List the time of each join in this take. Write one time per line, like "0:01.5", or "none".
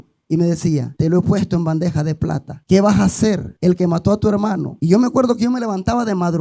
0:00.9
0:02.5
0:03.5
0:04.7